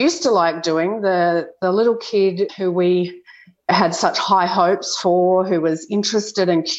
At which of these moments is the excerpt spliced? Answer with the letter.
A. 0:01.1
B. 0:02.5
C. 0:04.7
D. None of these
B